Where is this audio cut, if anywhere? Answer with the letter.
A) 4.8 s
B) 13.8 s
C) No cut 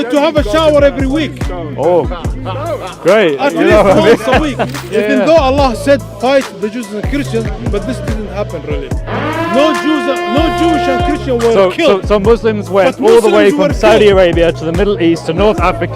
A